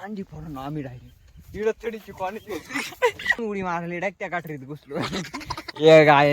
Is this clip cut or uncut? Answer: cut